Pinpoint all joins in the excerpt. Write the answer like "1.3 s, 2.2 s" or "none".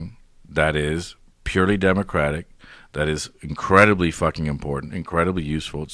none